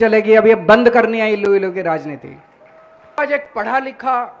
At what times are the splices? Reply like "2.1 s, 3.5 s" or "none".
3.2 s